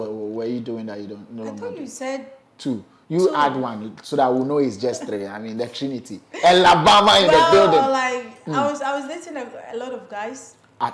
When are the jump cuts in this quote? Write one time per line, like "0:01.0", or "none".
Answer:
none